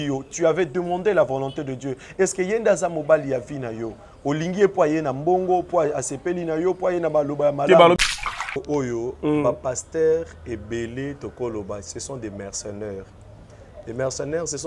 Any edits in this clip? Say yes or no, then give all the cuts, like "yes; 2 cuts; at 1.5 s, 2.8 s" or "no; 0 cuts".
yes; 1 cut; at 8.1 s